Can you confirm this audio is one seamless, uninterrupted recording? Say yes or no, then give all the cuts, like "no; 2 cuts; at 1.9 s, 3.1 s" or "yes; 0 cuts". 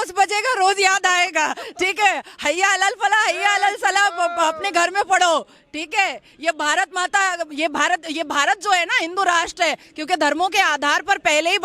yes; 0 cuts